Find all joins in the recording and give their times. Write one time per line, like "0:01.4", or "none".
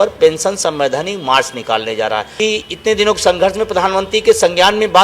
0:02.3